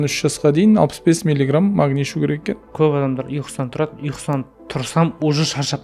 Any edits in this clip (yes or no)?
yes